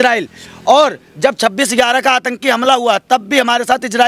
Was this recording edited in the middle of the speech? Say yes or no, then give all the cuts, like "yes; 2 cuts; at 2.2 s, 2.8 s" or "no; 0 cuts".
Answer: no; 0 cuts